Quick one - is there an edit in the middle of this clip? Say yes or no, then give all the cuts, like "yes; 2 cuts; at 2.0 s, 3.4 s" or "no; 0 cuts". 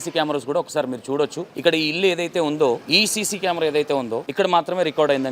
yes; 3 cuts; at 1.4 s, 2.8 s, 4.2 s